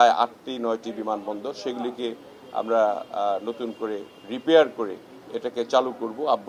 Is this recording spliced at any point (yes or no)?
no